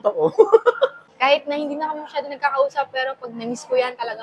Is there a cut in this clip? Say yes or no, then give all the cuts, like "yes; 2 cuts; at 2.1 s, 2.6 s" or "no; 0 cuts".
yes; 1 cut; at 1.0 s